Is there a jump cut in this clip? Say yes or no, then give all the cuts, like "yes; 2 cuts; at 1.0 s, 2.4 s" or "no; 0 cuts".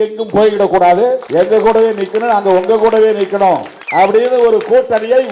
yes; 2 cuts; at 1.2 s, 3.8 s